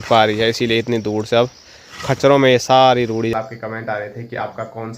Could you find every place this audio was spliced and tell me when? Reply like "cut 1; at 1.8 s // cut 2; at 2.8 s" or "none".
cut 1; at 3.3 s